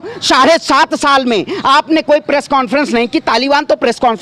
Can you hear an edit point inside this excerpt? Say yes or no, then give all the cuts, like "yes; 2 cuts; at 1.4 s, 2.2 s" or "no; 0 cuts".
no; 0 cuts